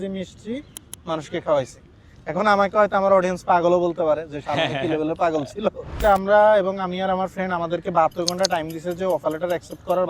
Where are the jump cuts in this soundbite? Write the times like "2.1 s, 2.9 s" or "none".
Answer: 5.9 s

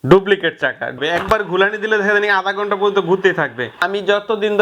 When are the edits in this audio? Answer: 1.0 s, 3.9 s

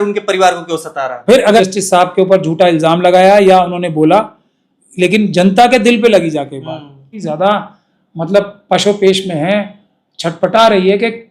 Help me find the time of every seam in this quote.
1.6 s, 7.2 s

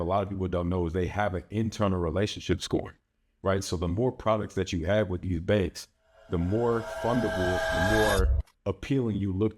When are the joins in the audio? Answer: 8.6 s

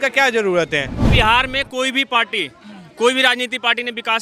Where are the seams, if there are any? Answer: 1.0 s

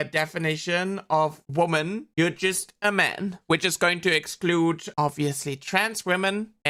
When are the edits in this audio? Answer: none

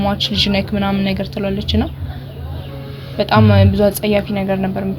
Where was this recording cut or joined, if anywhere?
none

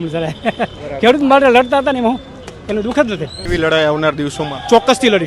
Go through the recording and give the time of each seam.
3.4 s

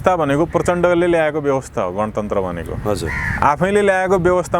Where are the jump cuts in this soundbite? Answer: none

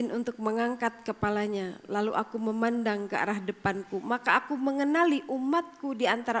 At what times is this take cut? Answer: none

